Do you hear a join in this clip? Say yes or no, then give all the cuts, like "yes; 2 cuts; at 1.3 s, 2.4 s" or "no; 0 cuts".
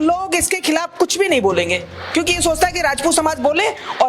no; 0 cuts